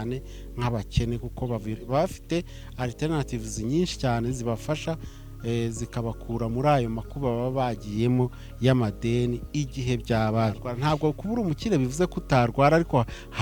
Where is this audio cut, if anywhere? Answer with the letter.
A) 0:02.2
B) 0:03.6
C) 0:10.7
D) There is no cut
C